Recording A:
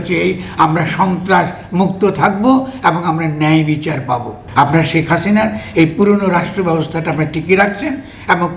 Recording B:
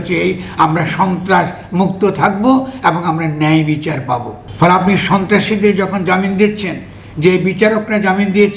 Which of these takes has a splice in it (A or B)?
A